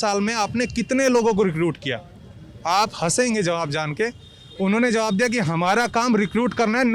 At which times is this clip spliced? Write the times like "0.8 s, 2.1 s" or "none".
none